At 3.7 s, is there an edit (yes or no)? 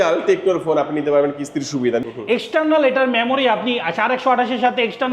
no